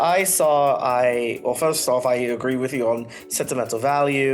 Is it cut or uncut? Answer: uncut